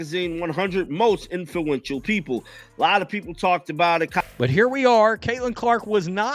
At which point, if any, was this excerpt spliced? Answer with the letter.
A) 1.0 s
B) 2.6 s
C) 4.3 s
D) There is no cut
C